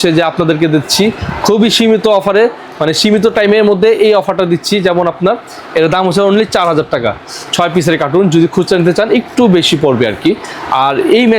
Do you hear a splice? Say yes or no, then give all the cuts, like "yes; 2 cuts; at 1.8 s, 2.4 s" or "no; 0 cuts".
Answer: no; 0 cuts